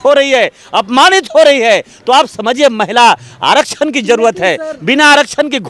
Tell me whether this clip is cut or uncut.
uncut